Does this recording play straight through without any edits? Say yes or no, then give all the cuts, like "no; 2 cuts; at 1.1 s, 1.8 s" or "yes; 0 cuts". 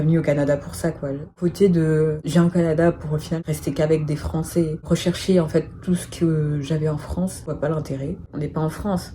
no; 5 cuts; at 1.3 s, 2.2 s, 3.4 s, 4.9 s, 8.3 s